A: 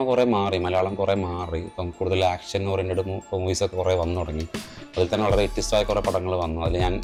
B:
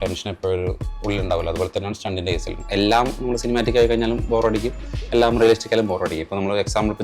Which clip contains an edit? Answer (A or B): B